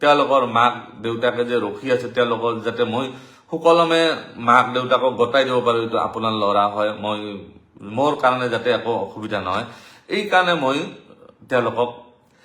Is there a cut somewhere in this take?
no; 0 cuts

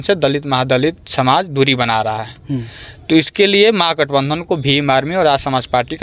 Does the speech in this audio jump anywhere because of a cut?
no; 0 cuts

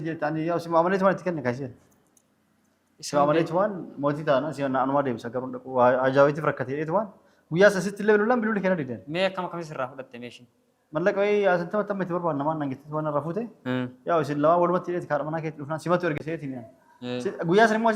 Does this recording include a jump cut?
no; 0 cuts

